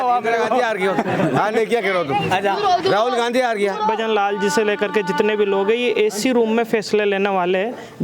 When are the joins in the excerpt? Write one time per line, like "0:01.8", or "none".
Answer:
0:03.9

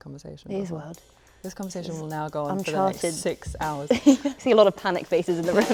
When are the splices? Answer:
0:04.3

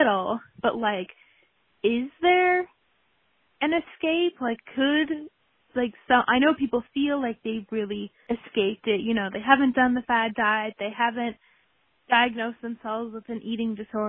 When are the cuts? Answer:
0:08.1

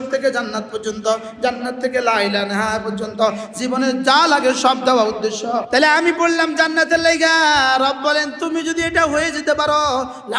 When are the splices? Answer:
0:05.7

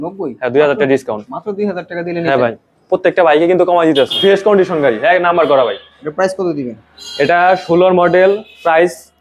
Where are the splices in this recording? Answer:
none

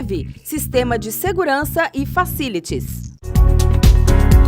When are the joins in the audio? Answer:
0:03.1

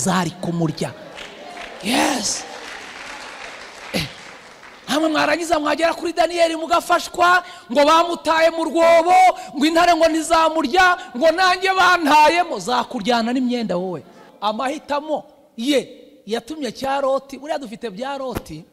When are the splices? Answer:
0:14.2

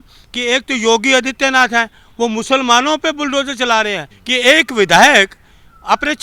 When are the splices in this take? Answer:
0:04.1

